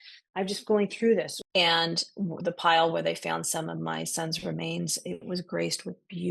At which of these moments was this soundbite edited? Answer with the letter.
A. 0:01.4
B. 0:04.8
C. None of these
A